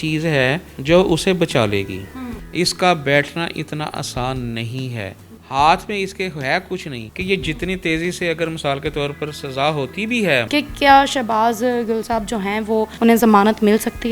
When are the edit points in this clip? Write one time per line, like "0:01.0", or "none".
0:02.3
0:07.1
0:10.5

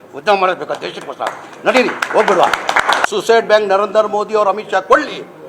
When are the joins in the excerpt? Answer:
0:03.0

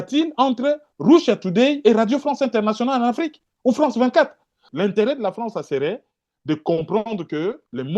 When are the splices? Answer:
0:04.6

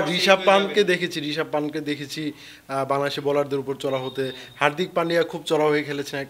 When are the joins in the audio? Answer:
none

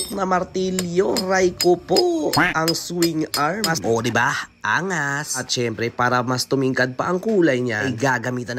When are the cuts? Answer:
0:03.8

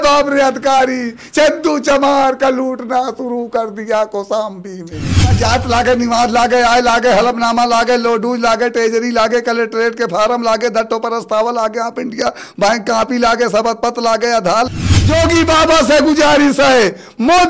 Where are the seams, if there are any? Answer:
0:05.4
0:14.7

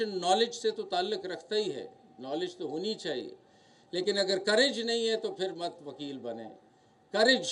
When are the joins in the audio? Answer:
none

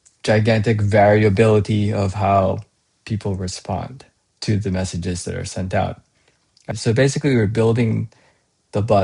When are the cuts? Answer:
0:06.7

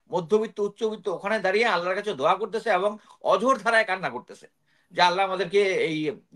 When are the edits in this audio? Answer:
none

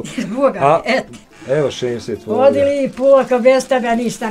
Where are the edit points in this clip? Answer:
0:01.2

